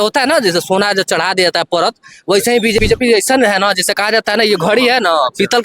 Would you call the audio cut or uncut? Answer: cut